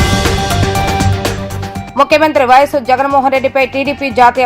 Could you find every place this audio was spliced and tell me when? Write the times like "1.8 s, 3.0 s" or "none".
1.7 s